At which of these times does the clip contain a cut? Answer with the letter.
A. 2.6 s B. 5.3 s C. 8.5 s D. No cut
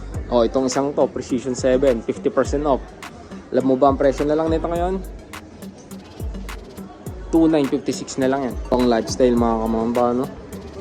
C